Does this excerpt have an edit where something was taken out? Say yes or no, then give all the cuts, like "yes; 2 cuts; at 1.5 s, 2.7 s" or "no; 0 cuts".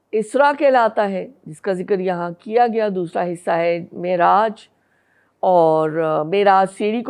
no; 0 cuts